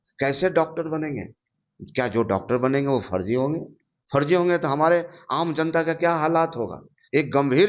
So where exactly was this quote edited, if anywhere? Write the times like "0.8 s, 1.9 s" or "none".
none